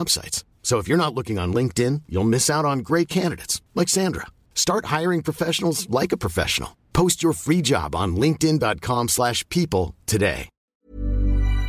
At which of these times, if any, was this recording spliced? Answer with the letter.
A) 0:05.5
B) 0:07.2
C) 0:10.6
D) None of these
C